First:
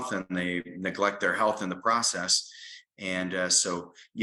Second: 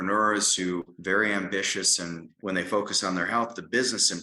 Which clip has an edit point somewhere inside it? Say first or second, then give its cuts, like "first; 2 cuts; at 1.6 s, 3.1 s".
second; 2 cuts; at 0.9 s, 2.3 s